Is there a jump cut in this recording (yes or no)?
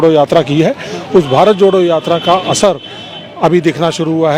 no